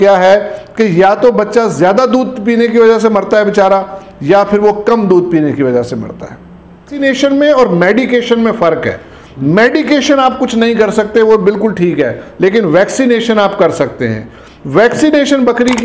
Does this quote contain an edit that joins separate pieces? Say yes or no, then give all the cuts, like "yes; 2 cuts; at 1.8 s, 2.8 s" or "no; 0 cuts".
yes; 1 cut; at 7.0 s